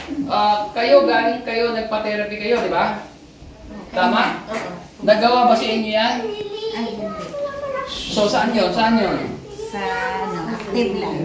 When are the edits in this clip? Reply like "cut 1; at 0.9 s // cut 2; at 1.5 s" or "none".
none